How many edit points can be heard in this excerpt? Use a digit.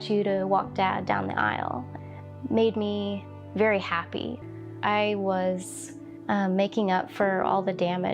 1